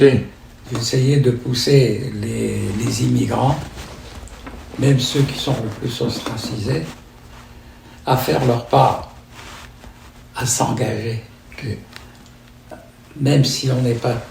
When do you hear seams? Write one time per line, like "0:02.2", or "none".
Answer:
none